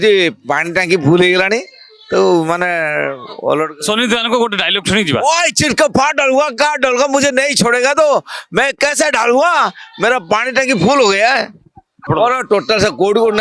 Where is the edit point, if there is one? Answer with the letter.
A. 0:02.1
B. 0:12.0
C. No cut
B